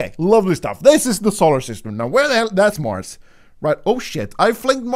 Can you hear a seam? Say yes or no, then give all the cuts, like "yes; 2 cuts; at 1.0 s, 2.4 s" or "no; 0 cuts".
no; 0 cuts